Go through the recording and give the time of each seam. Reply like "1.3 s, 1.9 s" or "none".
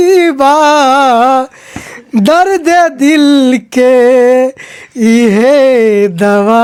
none